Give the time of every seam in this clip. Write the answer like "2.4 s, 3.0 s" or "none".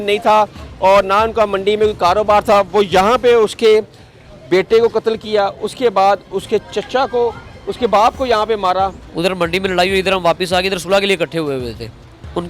9.0 s